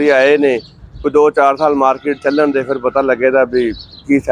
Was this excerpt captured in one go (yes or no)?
yes